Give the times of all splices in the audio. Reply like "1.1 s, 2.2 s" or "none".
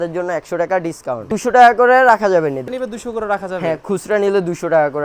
1.3 s, 2.6 s

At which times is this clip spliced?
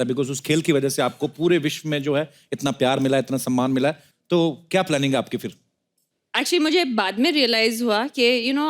4.1 s

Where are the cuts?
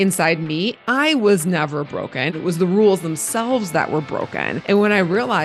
0.8 s, 2.3 s, 4.5 s

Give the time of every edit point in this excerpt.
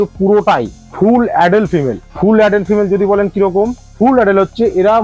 3.8 s

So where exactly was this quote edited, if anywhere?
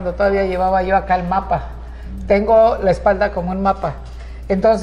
none

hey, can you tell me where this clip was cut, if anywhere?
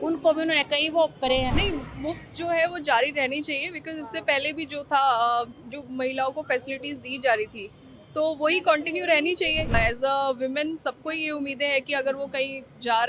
1.5 s, 9.7 s

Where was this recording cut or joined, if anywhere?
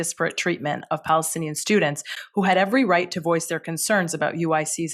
none

